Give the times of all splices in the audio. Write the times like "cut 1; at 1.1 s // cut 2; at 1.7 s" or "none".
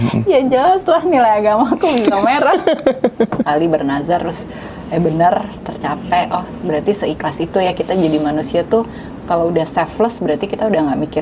cut 1; at 3.5 s

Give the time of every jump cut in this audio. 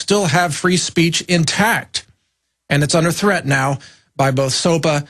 cut 1; at 1.3 s

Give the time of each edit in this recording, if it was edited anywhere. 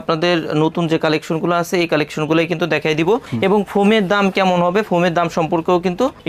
none

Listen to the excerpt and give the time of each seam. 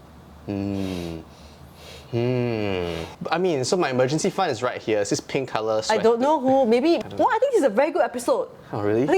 cut 1; at 3.2 s // cut 2; at 7.0 s

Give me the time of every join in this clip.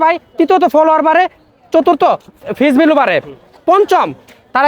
cut 1; at 2.4 s

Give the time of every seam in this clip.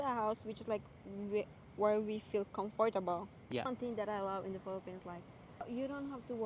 cut 1; at 3.7 s // cut 2; at 5.6 s

